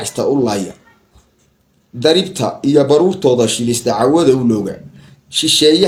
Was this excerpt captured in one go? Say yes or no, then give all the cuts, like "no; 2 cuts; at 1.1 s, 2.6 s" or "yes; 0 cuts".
yes; 0 cuts